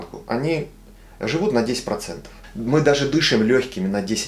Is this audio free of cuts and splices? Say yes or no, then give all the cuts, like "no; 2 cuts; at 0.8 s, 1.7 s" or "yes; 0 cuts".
no; 1 cut; at 2.5 s